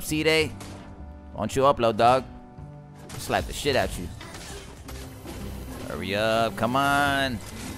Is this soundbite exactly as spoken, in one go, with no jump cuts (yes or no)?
yes